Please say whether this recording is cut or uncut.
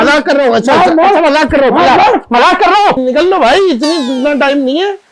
cut